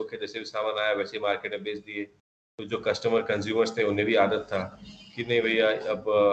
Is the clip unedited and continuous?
yes; 0 cuts

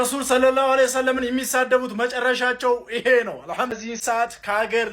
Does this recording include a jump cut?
yes; 1 cut; at 3.7 s

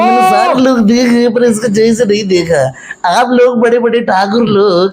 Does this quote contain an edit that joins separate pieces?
no; 0 cuts

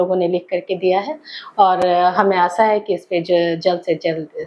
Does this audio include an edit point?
no; 0 cuts

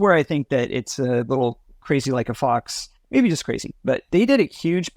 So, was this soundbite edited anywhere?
no; 0 cuts

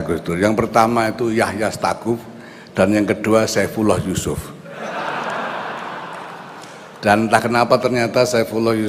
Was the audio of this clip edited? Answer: yes; 1 cut; at 6.9 s

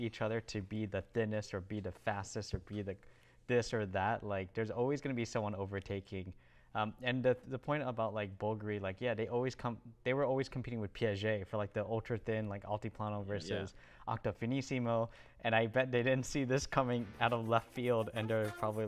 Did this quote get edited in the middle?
no; 0 cuts

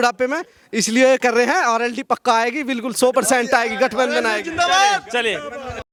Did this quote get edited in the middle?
no; 0 cuts

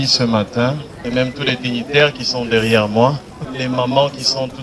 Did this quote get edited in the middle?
yes; 2 cuts; at 1.0 s, 3.4 s

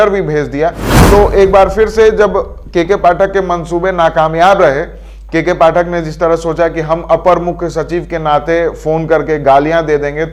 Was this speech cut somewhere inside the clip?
no; 0 cuts

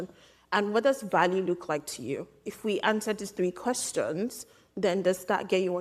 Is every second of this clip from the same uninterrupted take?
yes; 0 cuts

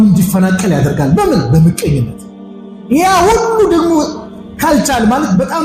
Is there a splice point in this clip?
no; 0 cuts

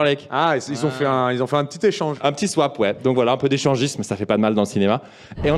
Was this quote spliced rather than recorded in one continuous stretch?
yes; 1 cut; at 2.1 s

